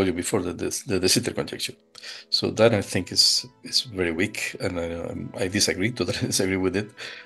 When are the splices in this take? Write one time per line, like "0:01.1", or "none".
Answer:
none